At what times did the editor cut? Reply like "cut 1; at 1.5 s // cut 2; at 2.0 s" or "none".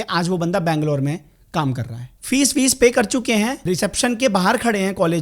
cut 1; at 1.9 s // cut 2; at 3.6 s